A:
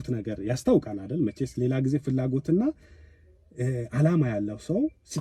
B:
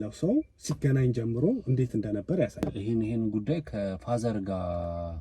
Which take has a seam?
B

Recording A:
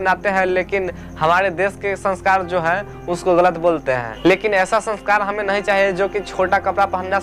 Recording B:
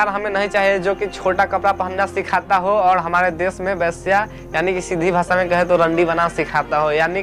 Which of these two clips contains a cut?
A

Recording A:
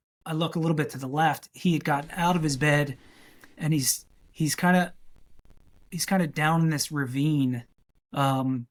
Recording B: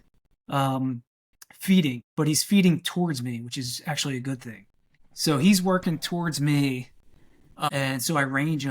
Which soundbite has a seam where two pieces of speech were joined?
B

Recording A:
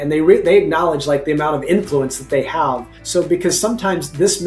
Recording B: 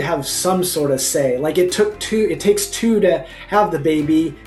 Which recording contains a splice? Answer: A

